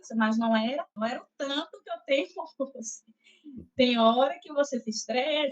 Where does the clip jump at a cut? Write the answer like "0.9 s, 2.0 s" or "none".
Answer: 1.0 s

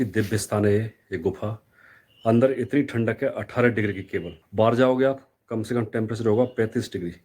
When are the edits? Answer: 4.4 s

